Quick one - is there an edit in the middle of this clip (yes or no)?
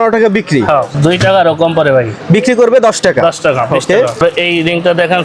yes